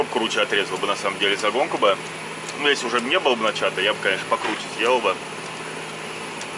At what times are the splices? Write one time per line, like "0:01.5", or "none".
none